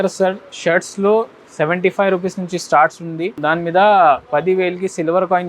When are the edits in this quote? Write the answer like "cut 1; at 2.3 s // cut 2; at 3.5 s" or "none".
cut 1; at 3.3 s